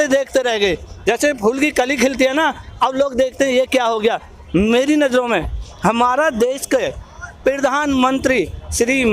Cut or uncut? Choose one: uncut